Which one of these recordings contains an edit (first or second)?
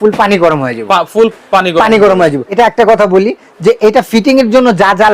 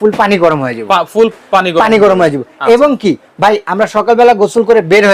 first